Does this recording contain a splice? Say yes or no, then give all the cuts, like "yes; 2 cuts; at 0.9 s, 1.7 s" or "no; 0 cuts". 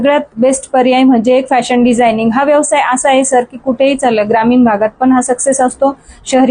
no; 0 cuts